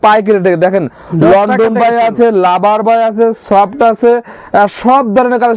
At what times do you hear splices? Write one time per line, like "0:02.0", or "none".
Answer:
none

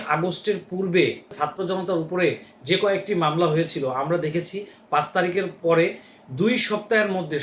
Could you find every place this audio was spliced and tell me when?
0:01.3

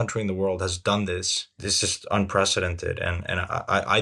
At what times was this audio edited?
0:01.7

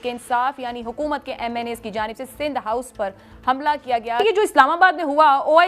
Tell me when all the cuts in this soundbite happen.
0:04.2

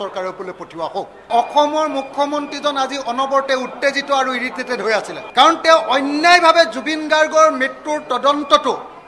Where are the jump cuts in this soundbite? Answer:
0:01.3
0:05.2

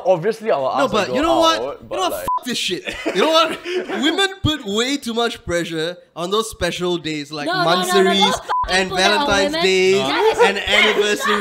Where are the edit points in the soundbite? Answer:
none

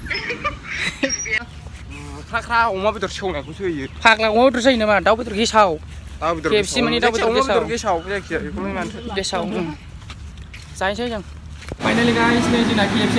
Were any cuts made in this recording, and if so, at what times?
0:01.4
0:11.8

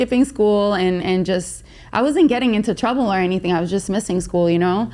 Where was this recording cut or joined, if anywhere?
none

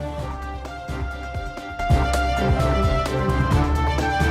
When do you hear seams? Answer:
0:01.7

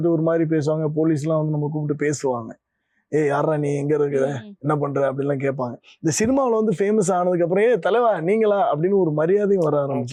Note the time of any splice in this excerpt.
none

